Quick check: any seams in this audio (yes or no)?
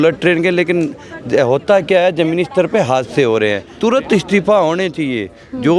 yes